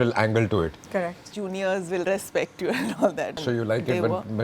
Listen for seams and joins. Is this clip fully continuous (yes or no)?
no